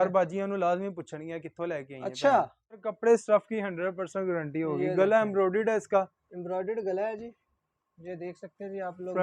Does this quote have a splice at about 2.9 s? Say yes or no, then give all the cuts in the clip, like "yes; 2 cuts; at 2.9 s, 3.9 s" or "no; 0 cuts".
yes; 1 cut; at 2.9 s